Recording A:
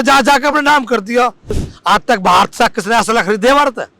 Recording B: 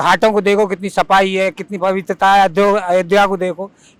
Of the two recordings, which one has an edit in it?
A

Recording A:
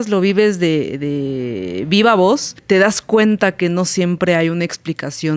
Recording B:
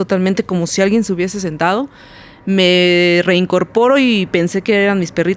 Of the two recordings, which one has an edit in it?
A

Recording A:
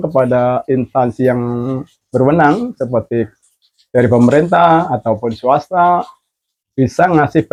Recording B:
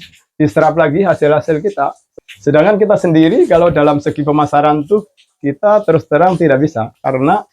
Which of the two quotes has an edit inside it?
B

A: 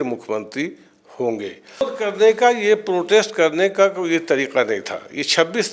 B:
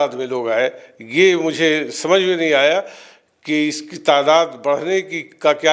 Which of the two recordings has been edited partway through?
A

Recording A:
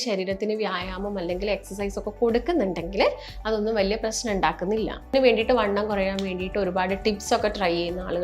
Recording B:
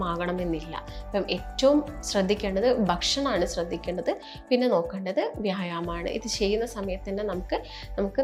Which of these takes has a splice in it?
A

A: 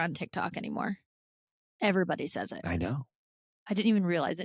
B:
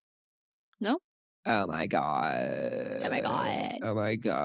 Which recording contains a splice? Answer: B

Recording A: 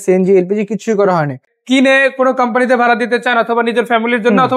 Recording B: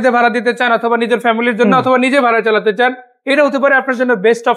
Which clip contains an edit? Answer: A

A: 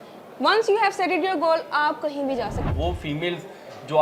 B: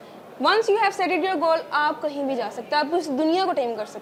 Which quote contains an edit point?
A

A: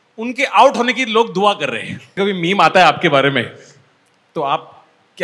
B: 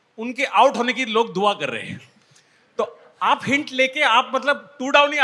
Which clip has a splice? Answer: A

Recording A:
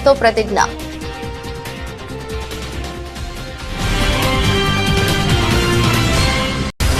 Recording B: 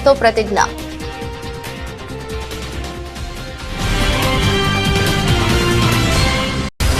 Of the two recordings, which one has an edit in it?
B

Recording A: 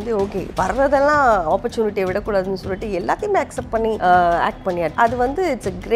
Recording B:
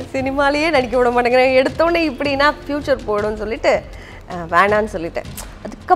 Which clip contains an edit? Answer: A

